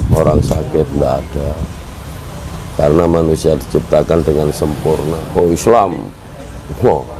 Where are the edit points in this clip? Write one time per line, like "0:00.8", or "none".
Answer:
0:05.2